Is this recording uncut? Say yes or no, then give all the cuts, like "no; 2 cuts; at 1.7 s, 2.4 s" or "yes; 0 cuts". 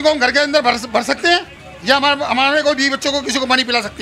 yes; 0 cuts